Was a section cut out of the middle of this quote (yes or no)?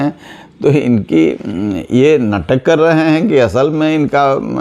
no